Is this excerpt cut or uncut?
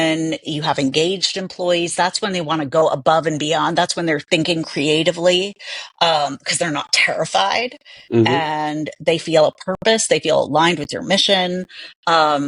uncut